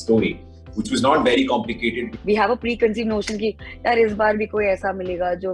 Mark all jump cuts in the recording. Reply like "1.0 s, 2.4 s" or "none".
2.1 s